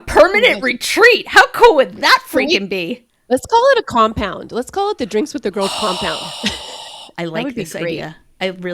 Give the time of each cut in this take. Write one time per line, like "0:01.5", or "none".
0:07.0